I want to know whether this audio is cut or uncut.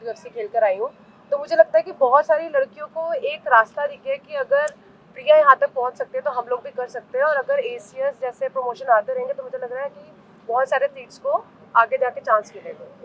uncut